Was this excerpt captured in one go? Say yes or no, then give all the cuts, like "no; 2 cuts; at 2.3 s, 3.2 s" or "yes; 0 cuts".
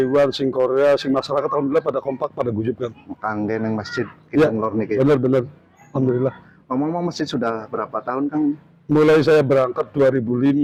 yes; 0 cuts